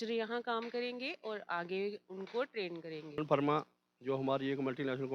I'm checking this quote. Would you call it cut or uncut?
cut